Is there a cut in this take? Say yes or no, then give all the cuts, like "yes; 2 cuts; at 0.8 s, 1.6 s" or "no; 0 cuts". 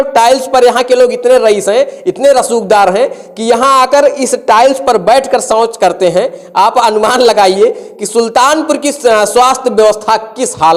no; 0 cuts